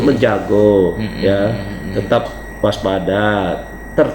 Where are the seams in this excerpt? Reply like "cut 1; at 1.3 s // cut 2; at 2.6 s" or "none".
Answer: cut 1; at 2.3 s